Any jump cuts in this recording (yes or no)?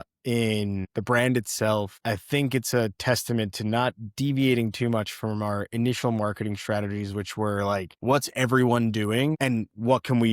yes